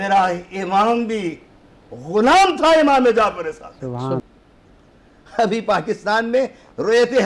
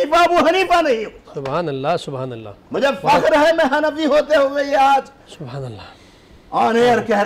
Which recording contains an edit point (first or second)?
first